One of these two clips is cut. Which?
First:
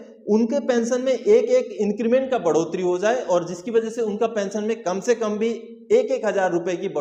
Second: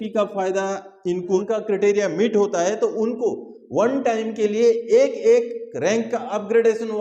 second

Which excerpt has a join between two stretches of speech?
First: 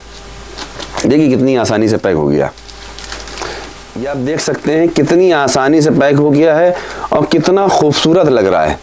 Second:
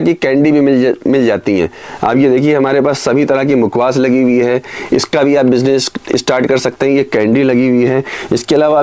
first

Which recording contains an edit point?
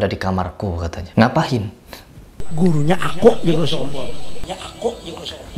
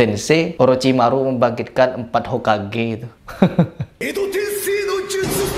first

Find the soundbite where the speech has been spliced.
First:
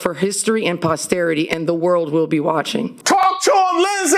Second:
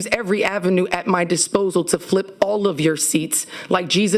first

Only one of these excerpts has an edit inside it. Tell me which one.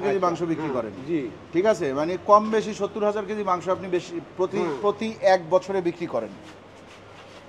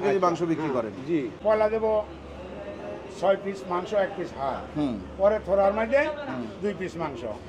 second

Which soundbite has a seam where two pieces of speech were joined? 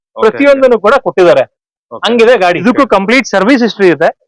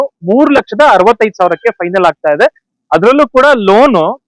first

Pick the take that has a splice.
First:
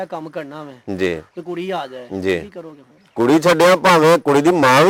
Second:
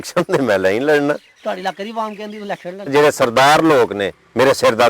second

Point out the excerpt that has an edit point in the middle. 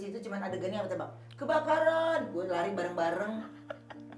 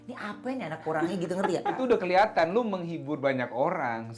second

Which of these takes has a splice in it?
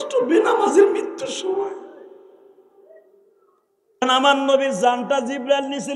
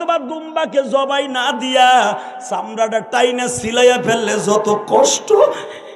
first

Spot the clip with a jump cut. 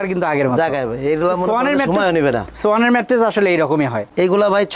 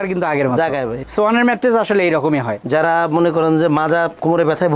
second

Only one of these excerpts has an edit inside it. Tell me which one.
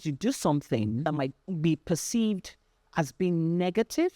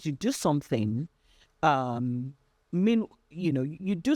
first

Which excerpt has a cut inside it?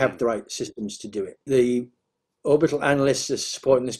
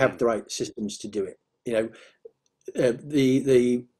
first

